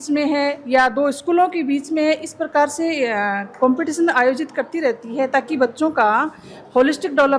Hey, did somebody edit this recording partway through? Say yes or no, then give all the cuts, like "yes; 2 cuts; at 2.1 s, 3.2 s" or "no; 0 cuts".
no; 0 cuts